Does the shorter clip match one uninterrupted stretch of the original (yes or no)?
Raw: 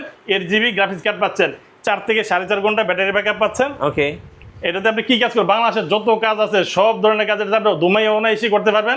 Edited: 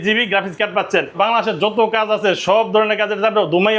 no